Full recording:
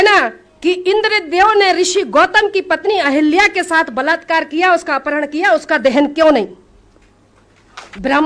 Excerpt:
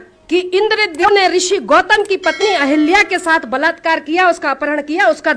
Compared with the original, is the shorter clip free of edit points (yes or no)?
no